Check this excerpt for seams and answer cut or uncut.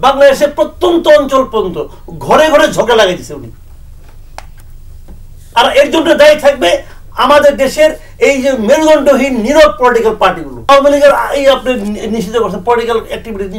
cut